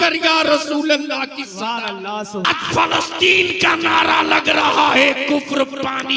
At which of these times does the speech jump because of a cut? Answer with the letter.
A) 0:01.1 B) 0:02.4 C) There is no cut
B